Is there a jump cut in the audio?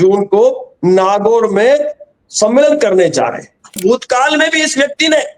yes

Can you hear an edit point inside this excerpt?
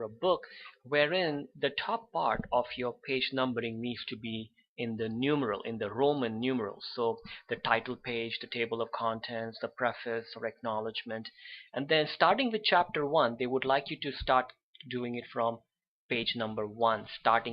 yes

